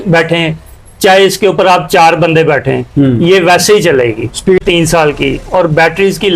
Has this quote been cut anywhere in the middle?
yes; 1 cut; at 4.6 s

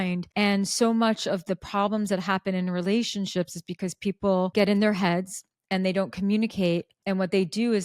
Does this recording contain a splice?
no; 0 cuts

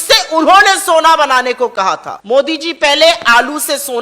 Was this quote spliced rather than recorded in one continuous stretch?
yes; 1 cut; at 2.1 s

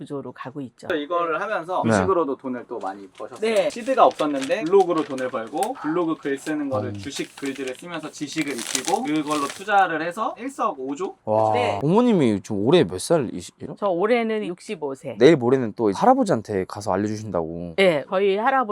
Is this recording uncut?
no; 3 cuts; at 0.9 s, 3.7 s, 11.8 s

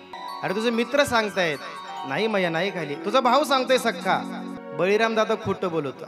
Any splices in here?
no; 0 cuts

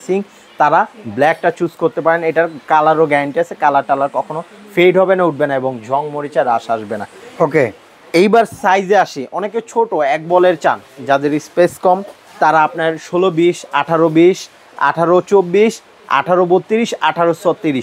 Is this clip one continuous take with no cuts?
yes; 0 cuts

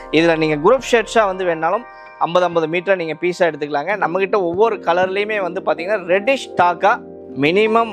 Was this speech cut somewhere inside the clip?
no; 0 cuts

